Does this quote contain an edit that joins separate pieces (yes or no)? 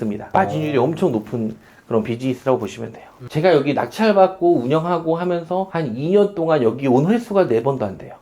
yes